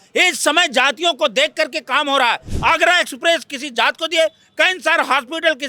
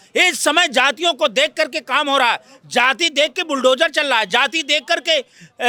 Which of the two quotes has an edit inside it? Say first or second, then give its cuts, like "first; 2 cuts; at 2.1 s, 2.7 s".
first; 1 cut; at 2.5 s